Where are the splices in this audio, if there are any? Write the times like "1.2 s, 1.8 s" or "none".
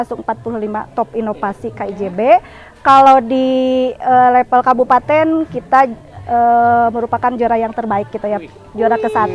none